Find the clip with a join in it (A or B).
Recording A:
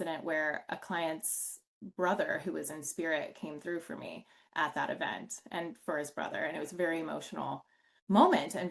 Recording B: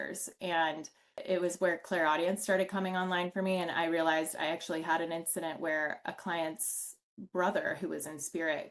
B